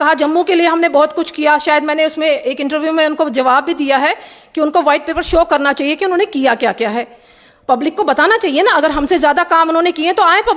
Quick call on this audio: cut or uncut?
uncut